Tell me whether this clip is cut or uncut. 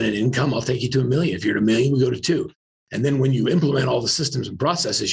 cut